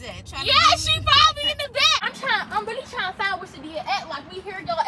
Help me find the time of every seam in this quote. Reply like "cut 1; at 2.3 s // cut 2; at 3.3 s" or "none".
cut 1; at 2.1 s